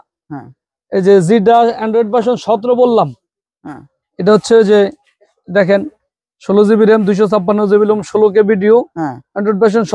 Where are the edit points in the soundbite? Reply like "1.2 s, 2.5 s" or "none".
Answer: none